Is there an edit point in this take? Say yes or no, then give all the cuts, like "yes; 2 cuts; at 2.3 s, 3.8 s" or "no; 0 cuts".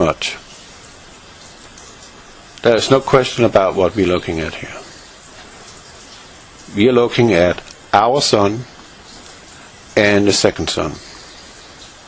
no; 0 cuts